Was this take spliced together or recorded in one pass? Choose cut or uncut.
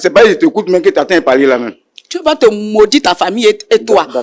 uncut